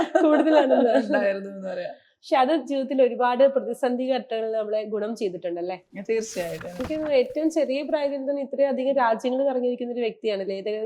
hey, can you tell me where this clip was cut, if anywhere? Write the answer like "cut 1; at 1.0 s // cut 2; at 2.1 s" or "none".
cut 1; at 6.8 s